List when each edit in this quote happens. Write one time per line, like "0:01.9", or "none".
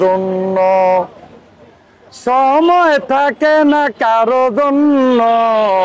none